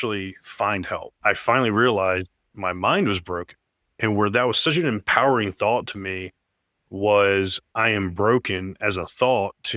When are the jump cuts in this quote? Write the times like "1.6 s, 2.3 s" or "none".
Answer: 1.1 s, 2.4 s, 7.7 s